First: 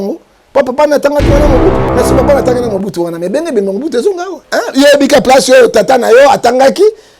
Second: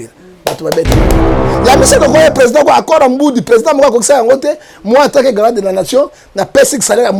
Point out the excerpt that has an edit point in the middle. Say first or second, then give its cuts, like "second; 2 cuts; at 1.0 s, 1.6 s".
first; 2 cuts; at 1.8 s, 4.3 s